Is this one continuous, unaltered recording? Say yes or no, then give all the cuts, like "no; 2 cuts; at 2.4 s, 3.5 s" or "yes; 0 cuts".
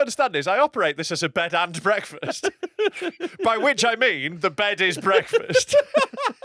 yes; 0 cuts